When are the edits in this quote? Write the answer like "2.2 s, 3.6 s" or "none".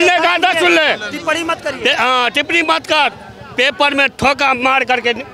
none